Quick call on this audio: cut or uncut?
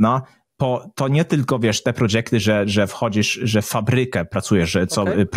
uncut